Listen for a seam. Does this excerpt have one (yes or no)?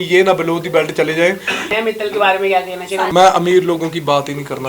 yes